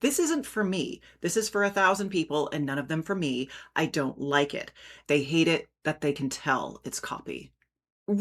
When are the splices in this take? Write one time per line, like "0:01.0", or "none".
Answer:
0:04.9